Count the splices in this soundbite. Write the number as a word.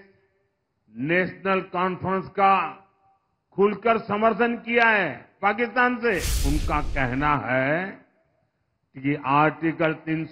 one